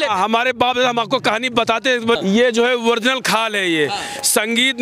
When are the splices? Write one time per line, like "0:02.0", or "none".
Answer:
0:02.2